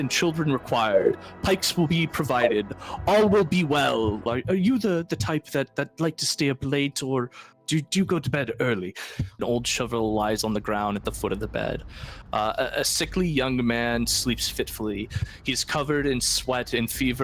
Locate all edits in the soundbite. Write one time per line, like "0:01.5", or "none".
0:04.2
0:09.4